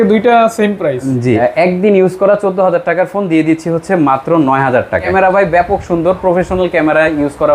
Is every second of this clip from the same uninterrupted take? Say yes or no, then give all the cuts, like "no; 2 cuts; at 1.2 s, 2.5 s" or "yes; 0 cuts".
no; 2 cuts; at 1.4 s, 5.1 s